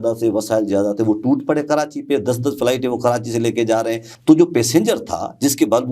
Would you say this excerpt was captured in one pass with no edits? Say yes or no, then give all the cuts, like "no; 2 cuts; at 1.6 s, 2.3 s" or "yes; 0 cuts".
no; 1 cut; at 4.1 s